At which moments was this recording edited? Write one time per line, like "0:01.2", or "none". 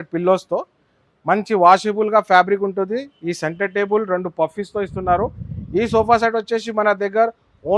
none